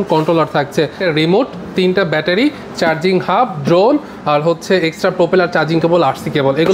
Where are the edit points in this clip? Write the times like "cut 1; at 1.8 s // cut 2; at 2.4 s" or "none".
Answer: cut 1; at 1.0 s